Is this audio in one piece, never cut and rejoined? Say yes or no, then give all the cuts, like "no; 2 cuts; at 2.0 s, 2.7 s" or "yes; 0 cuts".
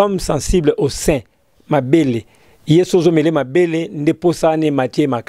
yes; 0 cuts